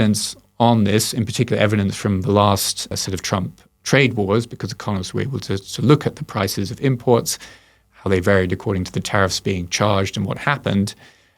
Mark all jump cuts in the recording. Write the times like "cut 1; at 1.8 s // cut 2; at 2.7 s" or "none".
cut 1; at 2.9 s

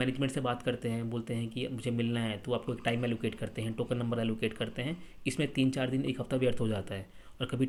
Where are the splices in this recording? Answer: none

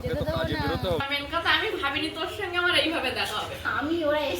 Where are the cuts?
cut 1; at 1.0 s // cut 2; at 3.6 s

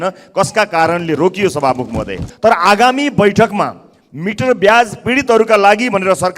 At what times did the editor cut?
cut 1; at 2.2 s

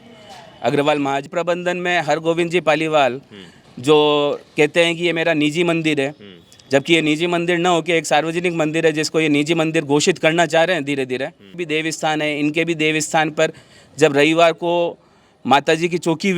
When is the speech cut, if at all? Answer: cut 1; at 1.3 s // cut 2; at 11.6 s

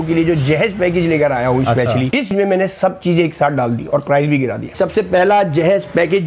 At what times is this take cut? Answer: cut 1; at 2.3 s // cut 2; at 4.7 s

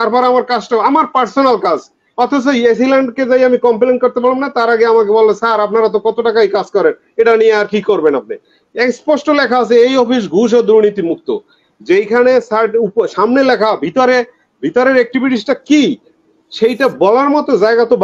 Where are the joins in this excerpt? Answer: none

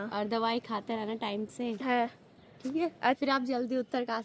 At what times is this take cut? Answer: cut 1; at 3.2 s

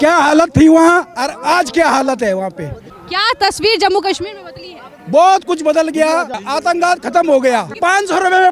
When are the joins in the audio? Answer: cut 1; at 2.9 s // cut 2; at 6.4 s // cut 3; at 7.7 s

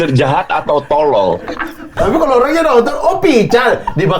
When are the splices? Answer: cut 1; at 2.0 s

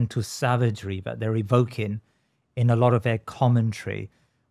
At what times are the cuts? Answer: none

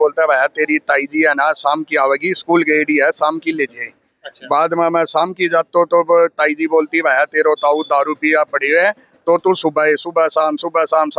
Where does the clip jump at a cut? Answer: none

